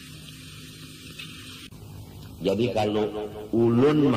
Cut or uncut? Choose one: cut